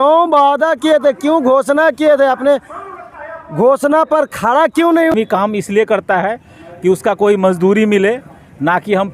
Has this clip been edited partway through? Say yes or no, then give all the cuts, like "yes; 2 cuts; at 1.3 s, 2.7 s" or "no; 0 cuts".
yes; 1 cut; at 5.1 s